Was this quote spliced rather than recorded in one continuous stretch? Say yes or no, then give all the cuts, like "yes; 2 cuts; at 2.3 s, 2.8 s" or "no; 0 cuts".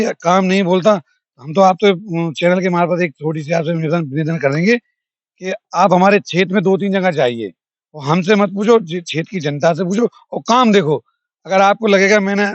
no; 0 cuts